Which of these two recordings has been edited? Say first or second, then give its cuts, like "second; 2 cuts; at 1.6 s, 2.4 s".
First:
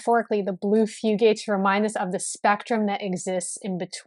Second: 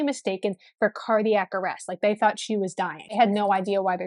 second; 1 cut; at 3.1 s